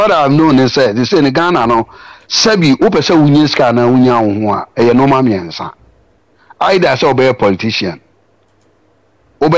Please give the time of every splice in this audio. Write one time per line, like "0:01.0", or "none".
none